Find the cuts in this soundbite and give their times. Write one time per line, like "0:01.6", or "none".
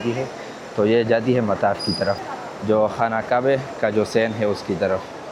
none